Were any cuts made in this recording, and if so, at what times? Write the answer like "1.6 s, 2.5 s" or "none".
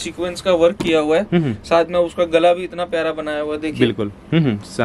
none